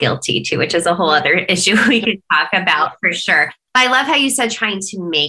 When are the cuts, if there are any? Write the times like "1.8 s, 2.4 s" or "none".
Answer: none